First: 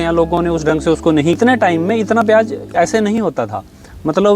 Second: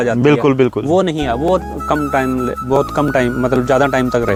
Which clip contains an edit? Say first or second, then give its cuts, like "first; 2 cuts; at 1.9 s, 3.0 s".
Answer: first; 1 cut; at 1.4 s